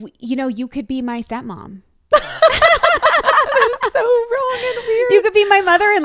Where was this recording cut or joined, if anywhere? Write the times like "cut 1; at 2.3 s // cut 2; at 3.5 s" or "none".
none